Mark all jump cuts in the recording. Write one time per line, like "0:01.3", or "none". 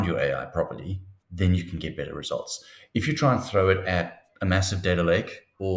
none